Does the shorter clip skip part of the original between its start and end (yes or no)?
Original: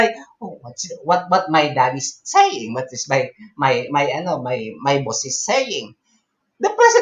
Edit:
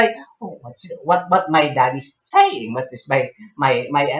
no